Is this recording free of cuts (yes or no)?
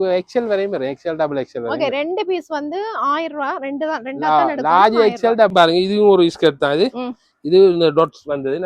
no